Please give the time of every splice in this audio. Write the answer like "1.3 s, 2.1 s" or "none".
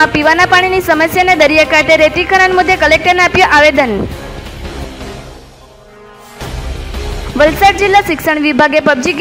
none